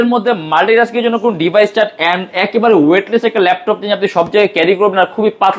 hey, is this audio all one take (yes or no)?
yes